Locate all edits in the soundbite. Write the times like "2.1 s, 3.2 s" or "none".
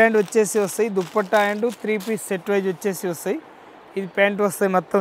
none